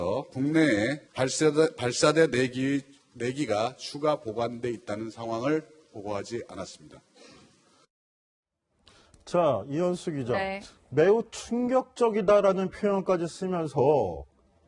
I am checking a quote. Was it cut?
no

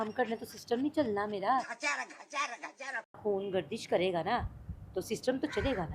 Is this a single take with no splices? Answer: no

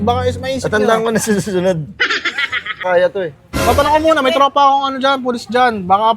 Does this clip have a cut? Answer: yes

